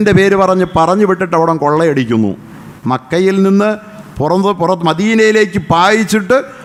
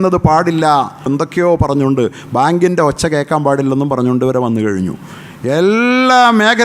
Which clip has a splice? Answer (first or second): second